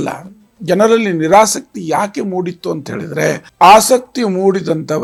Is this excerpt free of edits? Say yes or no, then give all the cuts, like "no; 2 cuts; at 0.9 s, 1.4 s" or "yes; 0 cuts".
yes; 0 cuts